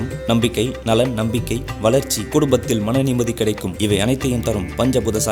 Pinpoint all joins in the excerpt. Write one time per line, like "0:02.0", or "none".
none